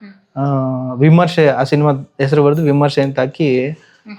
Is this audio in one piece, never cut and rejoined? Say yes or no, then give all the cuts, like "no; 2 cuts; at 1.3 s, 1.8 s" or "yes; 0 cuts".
yes; 0 cuts